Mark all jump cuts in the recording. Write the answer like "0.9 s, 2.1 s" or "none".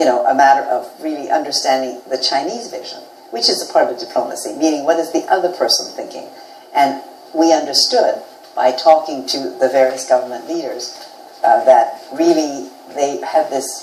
none

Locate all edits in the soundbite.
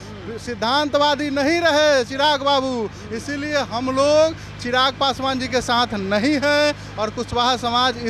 none

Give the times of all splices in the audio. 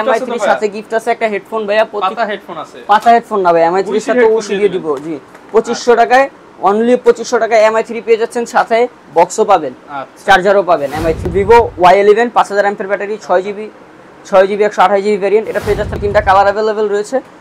11.3 s, 16.0 s

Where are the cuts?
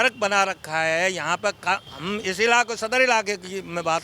1.9 s

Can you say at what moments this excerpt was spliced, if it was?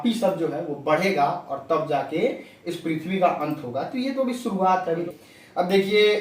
5.1 s

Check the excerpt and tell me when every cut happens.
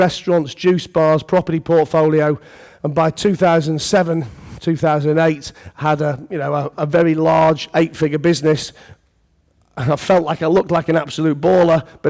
none

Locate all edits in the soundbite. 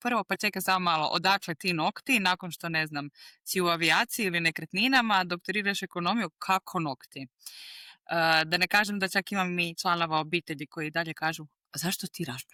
none

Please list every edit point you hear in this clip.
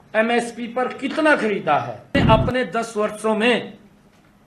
2.1 s

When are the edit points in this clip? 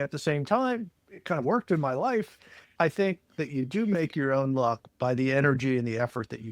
2.7 s

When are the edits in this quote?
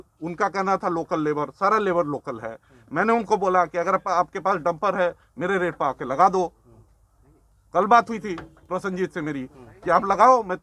none

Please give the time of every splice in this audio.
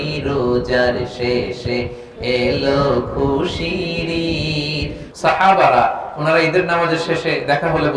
5.0 s

